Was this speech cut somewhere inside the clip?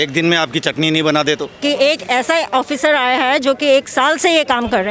yes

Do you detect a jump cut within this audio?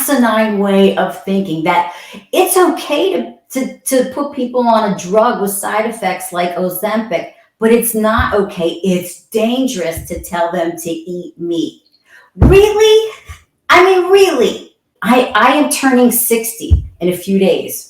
yes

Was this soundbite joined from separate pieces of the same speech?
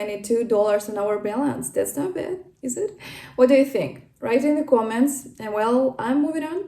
no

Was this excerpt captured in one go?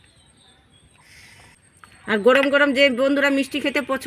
no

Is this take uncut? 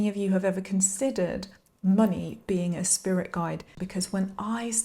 no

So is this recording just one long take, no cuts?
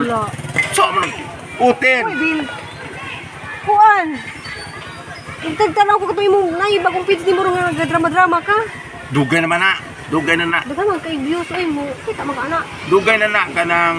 yes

